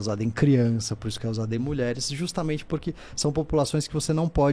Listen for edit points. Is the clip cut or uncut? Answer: uncut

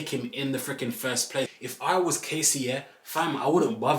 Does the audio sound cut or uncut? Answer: cut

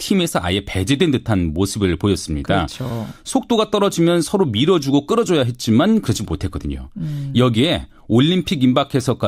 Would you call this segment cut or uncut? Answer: cut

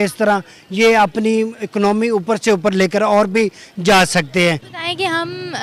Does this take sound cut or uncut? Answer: uncut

